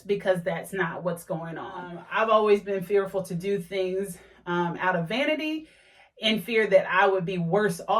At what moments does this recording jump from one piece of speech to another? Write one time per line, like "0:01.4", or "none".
0:02.0